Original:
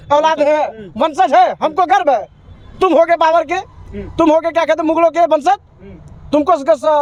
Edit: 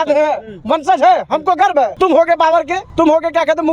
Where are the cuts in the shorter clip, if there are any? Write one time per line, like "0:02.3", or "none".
0:01.9
0:02.8